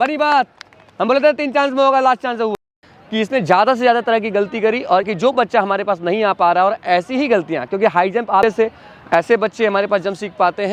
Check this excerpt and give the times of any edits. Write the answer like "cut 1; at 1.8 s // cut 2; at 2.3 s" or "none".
cut 1; at 2.5 s // cut 2; at 5.1 s // cut 3; at 8.4 s